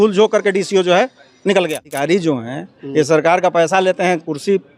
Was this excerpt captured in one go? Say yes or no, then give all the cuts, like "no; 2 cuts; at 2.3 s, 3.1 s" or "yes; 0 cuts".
no; 1 cut; at 1.9 s